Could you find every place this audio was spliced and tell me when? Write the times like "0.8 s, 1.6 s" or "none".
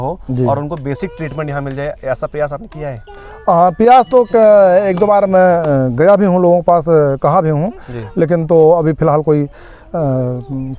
none